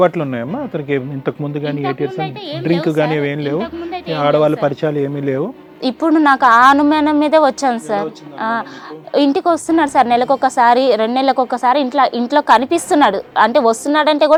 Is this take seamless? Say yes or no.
yes